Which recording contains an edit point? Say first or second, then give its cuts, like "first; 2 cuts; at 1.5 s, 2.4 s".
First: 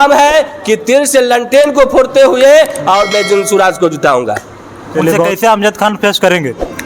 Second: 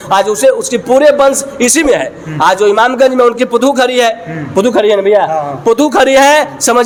first; 1 cut; at 5.3 s